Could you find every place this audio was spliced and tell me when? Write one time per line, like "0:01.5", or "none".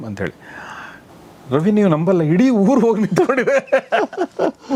none